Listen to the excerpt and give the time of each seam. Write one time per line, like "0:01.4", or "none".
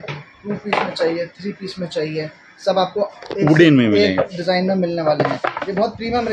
none